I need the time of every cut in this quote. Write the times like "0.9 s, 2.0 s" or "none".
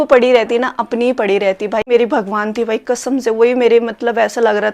1.9 s